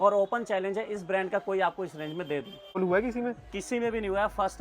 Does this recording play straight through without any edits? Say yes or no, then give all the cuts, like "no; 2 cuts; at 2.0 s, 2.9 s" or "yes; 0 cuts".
no; 1 cut; at 2.8 s